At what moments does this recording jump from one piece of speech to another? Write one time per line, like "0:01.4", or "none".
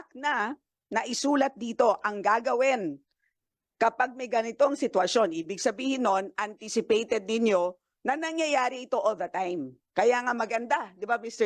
none